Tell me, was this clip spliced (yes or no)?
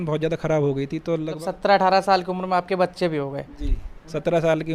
yes